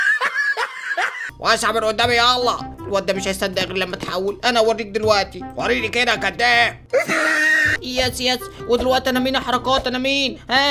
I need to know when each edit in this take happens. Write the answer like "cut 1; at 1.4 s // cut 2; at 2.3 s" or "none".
cut 1; at 1.2 s